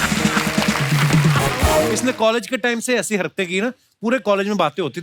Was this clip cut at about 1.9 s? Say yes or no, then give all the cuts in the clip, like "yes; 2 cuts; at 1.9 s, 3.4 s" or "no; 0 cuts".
yes; 1 cut; at 1.9 s